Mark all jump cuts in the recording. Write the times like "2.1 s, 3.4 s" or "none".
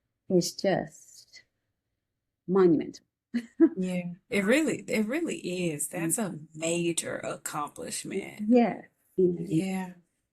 8.9 s